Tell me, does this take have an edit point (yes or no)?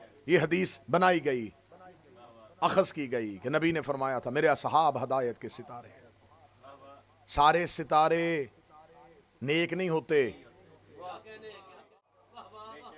yes